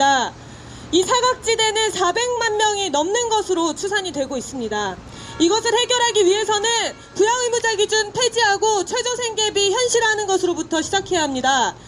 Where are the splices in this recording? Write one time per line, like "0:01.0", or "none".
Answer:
none